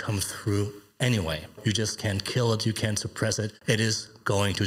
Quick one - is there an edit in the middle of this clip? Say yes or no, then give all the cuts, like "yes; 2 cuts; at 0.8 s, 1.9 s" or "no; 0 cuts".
yes; 2 cuts; at 1.6 s, 3.6 s